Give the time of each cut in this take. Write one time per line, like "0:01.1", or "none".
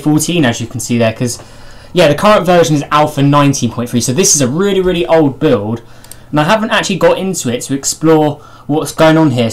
none